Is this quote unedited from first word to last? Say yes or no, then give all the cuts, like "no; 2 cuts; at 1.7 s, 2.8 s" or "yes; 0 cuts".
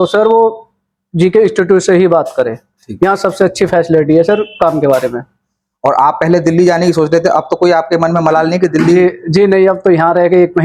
yes; 0 cuts